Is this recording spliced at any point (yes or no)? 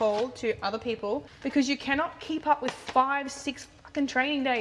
yes